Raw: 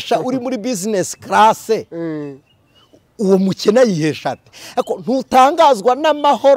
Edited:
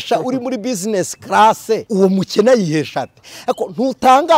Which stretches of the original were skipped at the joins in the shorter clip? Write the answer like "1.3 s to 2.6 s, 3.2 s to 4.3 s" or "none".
1.8 s to 3.1 s